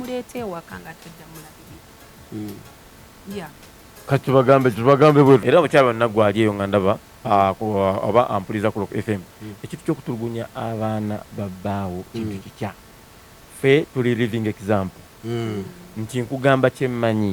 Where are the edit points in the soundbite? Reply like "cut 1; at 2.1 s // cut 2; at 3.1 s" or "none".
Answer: cut 1; at 5.4 s